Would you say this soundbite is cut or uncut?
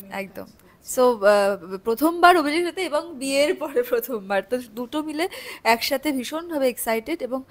uncut